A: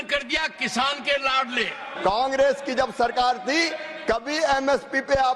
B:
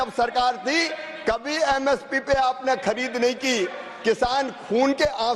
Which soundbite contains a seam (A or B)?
A